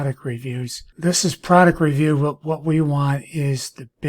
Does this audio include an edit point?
yes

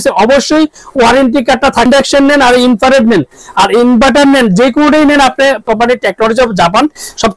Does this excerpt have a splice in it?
yes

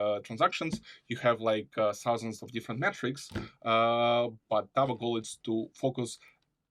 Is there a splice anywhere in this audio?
no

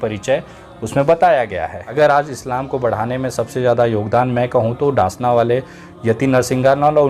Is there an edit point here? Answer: yes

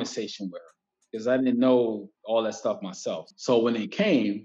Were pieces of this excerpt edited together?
yes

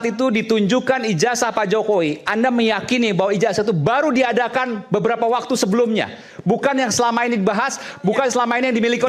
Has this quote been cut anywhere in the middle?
no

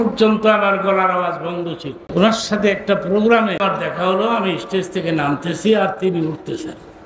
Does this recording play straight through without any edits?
no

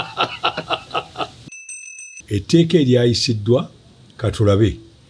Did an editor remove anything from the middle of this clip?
yes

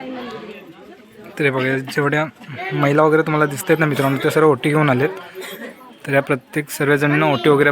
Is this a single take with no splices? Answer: yes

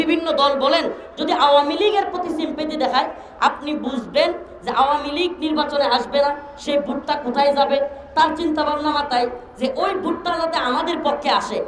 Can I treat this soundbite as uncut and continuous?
yes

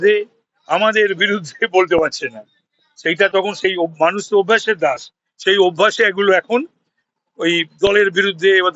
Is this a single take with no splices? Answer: yes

